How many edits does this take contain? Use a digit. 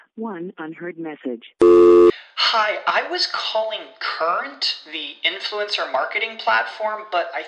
0